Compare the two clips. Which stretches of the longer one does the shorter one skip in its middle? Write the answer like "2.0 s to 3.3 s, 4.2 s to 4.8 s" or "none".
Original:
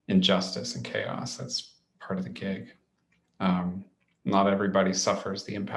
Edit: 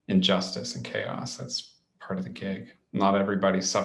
2.8 s to 4.1 s